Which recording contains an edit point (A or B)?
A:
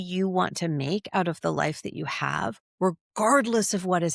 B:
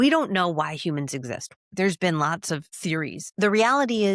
B